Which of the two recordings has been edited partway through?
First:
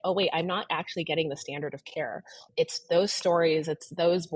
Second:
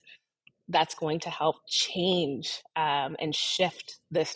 first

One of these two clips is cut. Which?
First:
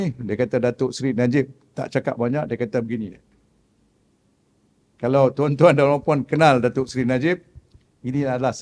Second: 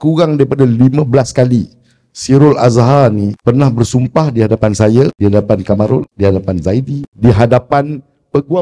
second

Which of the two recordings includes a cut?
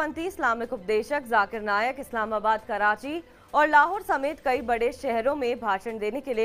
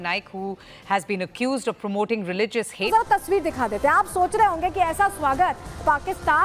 second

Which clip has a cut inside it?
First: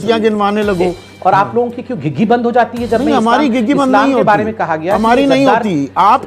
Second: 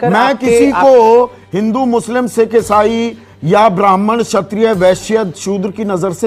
first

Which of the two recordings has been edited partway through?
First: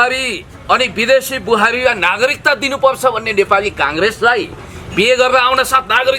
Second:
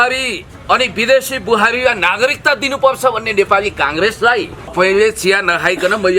second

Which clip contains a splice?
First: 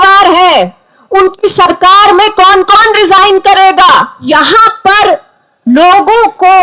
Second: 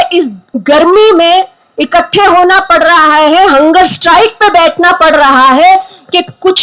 first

